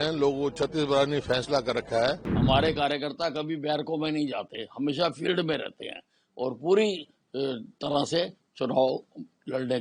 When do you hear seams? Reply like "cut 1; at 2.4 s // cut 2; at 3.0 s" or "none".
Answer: cut 1; at 2.3 s